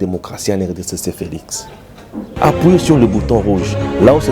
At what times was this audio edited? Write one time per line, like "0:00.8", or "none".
0:02.3